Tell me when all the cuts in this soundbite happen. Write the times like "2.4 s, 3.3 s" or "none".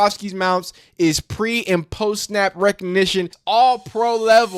3.4 s